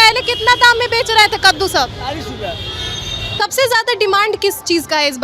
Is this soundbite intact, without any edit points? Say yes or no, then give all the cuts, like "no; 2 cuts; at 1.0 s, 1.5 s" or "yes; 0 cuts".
no; 1 cut; at 3.4 s